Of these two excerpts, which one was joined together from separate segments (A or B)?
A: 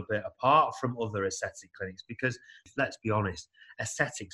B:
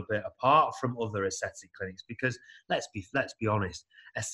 A